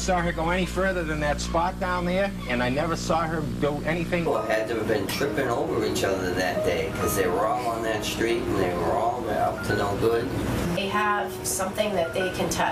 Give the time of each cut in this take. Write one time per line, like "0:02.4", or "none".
none